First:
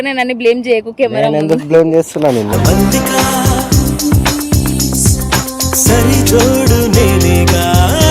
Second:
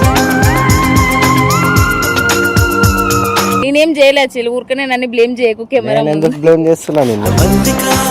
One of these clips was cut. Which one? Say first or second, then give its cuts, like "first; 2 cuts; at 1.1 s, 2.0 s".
second; 1 cut; at 3.6 s